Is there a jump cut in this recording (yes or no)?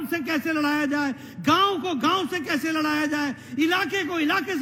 no